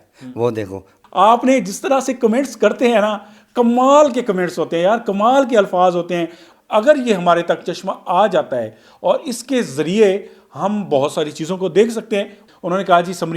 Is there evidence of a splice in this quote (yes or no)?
yes